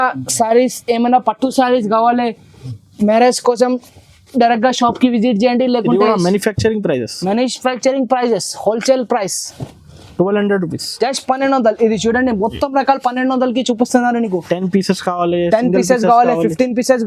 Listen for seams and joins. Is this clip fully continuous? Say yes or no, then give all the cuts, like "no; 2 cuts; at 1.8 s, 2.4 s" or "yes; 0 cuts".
yes; 0 cuts